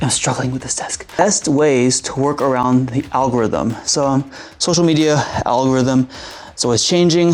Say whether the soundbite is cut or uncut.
cut